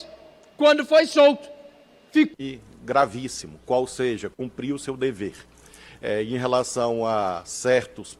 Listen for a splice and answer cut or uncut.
cut